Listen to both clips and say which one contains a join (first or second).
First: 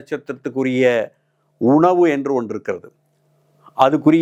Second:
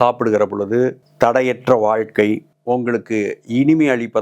second